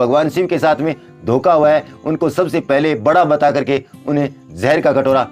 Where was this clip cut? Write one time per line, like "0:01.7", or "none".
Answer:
none